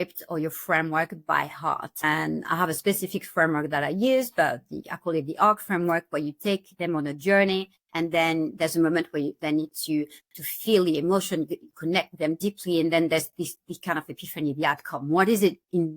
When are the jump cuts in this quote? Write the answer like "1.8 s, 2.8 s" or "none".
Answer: 2.0 s, 7.8 s